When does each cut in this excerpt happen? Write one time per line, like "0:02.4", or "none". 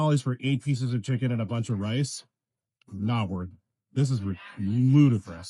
none

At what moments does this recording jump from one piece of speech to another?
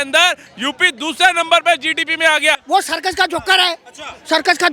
0:02.6

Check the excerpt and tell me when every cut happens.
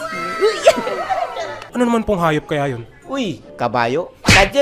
0:01.6

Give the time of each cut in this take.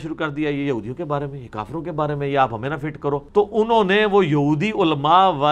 none

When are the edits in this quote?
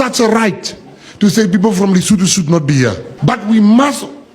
0:03.1

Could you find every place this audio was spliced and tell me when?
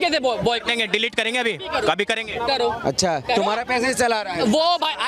none

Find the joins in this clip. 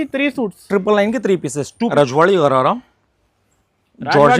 0:01.7

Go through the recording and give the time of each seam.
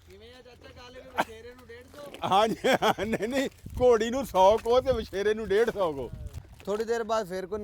0:06.3

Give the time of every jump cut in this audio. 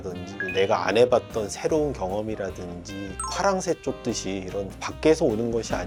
none

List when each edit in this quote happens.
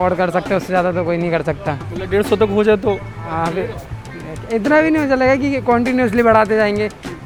none

